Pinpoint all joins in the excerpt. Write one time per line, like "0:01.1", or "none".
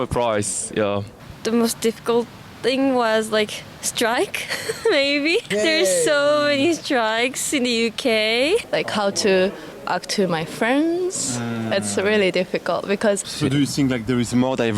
0:01.2
0:05.5
0:08.6
0:13.3

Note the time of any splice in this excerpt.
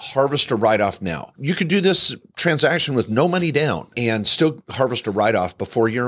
0:01.3
0:04.6

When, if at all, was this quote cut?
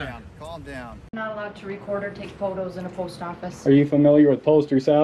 0:01.1

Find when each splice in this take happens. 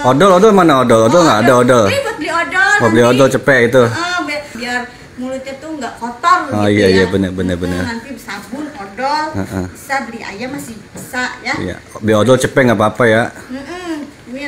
0:04.6

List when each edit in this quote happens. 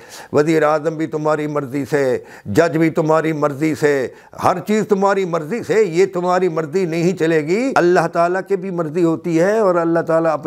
0:07.7

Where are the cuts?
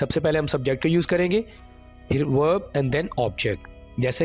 none

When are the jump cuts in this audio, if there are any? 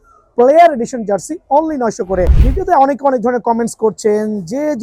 0:02.4

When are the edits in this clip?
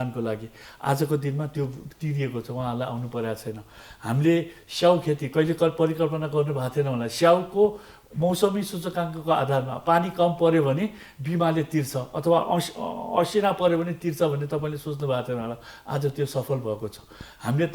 none

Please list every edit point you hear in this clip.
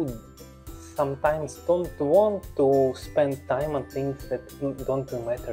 none

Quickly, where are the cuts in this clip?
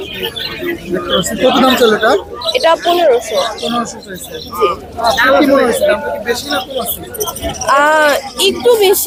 none

